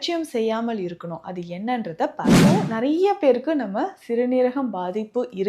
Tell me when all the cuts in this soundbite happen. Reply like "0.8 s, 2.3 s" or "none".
2.5 s